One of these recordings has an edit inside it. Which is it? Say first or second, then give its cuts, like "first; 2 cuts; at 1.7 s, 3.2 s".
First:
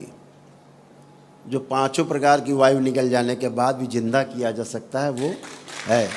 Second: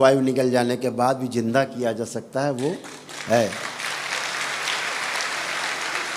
first; 1 cut; at 1.0 s